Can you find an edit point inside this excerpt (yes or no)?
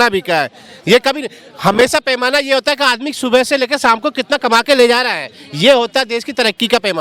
no